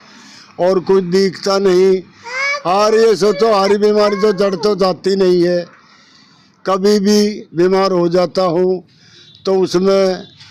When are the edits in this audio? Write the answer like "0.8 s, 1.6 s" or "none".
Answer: none